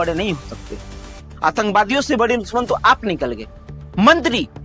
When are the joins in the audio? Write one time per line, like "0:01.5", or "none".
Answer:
0:01.3